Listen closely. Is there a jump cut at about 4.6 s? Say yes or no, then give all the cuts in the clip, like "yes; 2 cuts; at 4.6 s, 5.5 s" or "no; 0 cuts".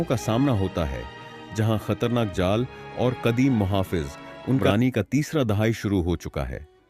yes; 1 cut; at 4.6 s